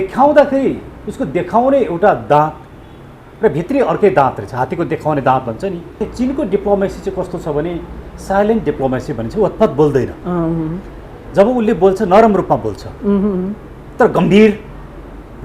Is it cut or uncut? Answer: cut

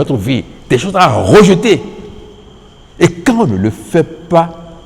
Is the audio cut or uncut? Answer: uncut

